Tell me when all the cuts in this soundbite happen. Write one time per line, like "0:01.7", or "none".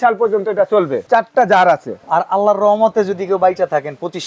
0:01.0
0:01.9